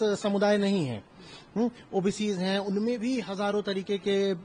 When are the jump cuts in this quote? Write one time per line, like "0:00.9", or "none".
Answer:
none